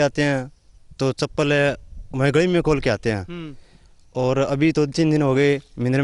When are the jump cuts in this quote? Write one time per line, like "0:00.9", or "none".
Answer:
none